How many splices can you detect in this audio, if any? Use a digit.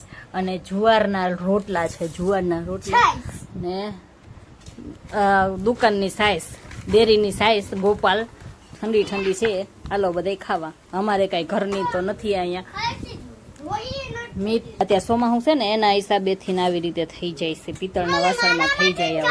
0